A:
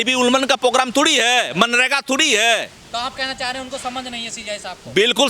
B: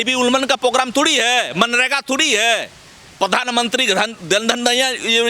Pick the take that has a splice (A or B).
A